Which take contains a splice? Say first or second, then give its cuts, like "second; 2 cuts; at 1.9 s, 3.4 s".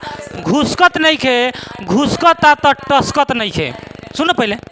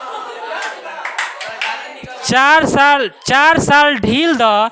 second; 1 cut; at 2.2 s